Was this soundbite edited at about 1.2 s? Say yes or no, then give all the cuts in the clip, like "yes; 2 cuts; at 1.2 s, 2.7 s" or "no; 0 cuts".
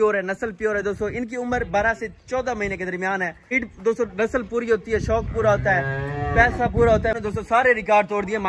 no; 2 cuts; at 3.6 s, 7.2 s